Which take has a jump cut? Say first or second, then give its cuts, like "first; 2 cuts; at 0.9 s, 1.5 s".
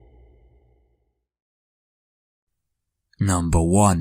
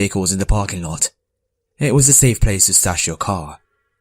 second; 1 cut; at 1.8 s